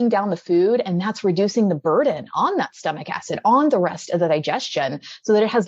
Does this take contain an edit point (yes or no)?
no